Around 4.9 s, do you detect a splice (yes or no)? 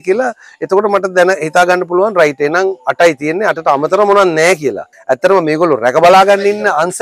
yes